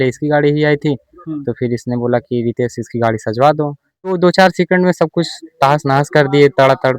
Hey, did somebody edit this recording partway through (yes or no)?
yes